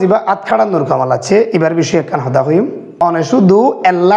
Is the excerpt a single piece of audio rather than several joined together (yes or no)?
no